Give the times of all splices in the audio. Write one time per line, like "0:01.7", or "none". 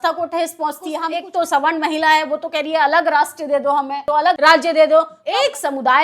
0:01.1
0:04.1
0:05.2